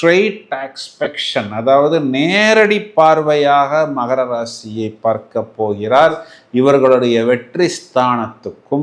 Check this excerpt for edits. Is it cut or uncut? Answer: uncut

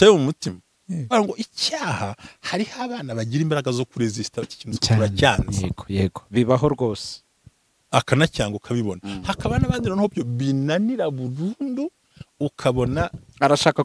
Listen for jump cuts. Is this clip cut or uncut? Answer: cut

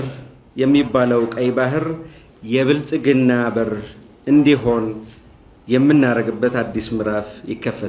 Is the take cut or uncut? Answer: uncut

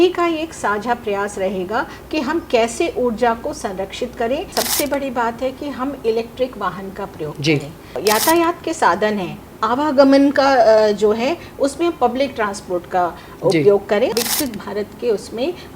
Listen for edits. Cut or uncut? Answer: cut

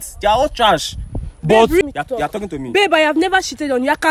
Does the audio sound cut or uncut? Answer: cut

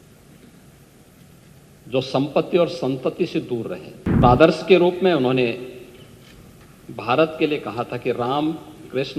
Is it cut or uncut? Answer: cut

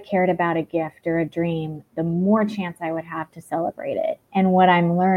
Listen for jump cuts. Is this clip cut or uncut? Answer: cut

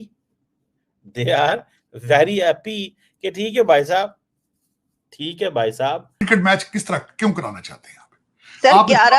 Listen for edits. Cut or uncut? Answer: cut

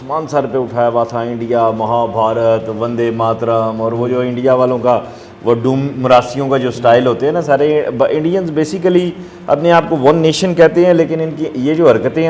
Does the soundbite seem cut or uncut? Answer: uncut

